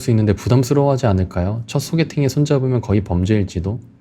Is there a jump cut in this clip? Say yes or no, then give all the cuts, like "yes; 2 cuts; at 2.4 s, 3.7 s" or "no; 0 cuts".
no; 0 cuts